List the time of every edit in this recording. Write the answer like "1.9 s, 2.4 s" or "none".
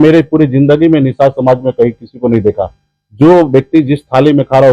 none